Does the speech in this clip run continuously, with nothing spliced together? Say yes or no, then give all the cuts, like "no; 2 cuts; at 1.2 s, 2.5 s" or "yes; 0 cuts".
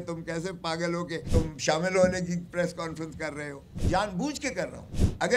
no; 2 cuts; at 1.2 s, 3.8 s